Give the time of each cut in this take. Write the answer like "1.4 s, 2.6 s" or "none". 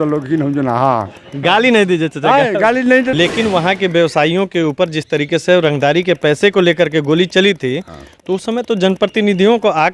3.1 s